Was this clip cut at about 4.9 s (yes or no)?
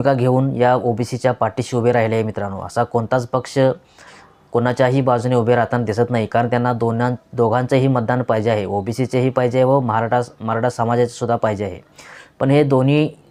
no